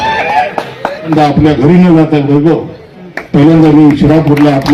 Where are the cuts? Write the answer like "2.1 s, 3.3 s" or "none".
1.1 s